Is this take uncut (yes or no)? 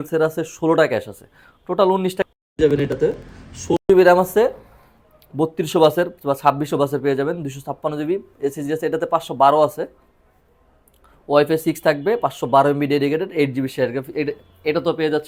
yes